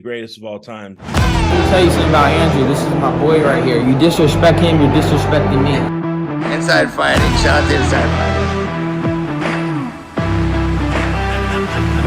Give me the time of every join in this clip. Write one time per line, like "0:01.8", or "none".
0:00.9